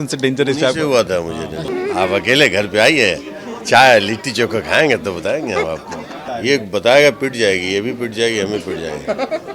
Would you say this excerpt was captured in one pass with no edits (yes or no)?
no